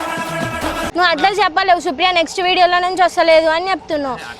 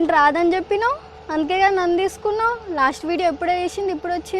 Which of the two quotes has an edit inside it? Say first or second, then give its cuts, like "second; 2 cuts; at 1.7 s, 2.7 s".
first; 1 cut; at 0.9 s